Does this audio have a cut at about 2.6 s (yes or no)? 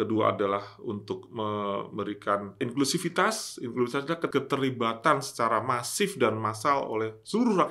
yes